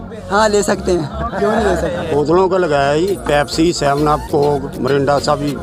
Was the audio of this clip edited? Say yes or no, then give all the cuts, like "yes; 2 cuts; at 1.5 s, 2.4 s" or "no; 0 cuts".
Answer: no; 0 cuts